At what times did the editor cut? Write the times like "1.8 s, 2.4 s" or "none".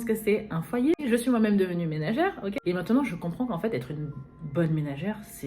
1.0 s, 2.6 s